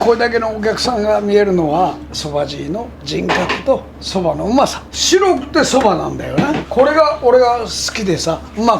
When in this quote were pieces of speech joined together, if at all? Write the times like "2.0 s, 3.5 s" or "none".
2.1 s, 4.9 s